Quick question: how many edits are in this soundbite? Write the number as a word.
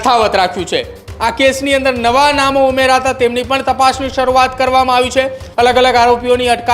two